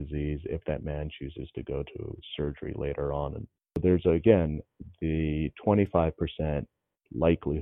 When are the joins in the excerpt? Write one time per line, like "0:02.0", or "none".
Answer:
0:03.8